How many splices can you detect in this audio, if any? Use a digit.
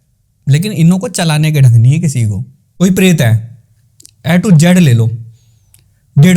1